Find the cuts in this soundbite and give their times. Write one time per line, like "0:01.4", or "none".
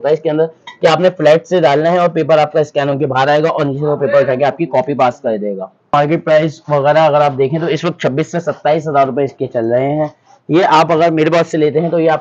0:05.9